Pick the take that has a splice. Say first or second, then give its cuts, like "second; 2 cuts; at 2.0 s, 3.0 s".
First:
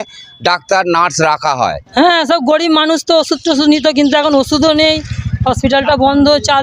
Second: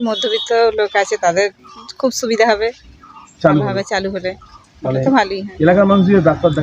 first; 1 cut; at 1.8 s